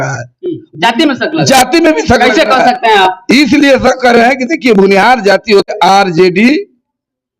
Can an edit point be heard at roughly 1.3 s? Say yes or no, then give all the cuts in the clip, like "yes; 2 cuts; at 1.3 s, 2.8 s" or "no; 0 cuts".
no; 1 cut; at 5.7 s